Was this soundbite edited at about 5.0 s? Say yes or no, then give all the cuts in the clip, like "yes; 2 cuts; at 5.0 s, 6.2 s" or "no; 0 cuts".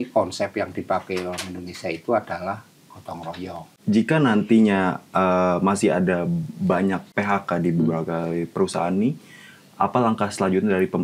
no; 2 cuts; at 3.7 s, 7.1 s